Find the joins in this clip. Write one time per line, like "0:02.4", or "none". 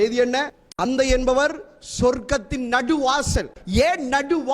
0:00.8
0:03.6